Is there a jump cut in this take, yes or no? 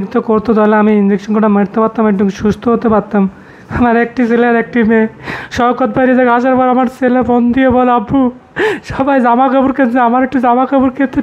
no